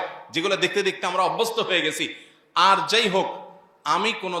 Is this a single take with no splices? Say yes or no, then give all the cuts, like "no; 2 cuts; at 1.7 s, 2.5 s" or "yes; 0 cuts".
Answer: yes; 0 cuts